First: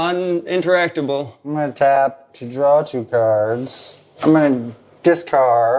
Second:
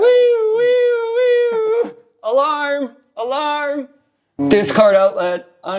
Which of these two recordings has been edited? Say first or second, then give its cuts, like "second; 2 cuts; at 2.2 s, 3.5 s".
first; 1 cut; at 4.0 s